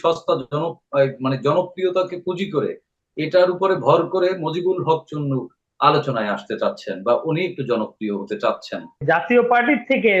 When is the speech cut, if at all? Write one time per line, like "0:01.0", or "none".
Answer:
0:09.0

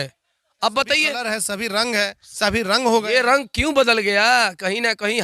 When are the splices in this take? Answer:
0:01.2

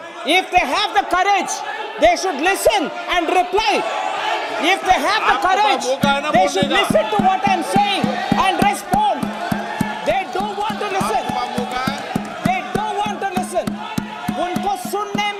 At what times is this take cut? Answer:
none

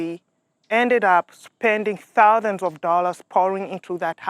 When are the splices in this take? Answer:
none

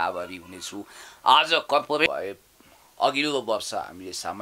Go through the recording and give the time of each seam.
0:02.1

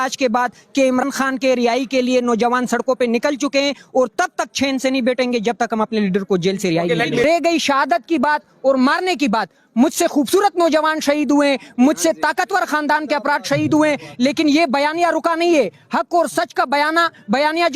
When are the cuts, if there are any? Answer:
0:01.0
0:07.2

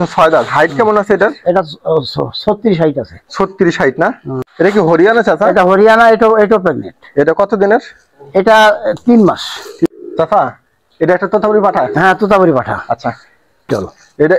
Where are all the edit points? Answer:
0:04.4
0:09.9
0:13.7

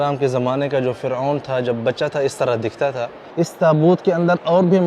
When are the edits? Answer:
0:03.2

